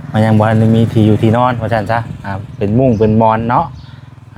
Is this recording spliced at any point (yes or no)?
no